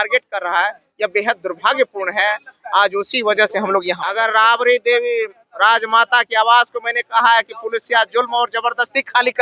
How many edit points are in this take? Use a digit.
1